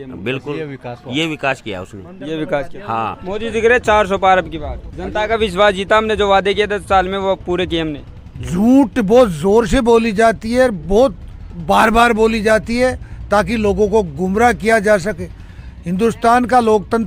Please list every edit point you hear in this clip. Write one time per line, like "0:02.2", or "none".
0:03.2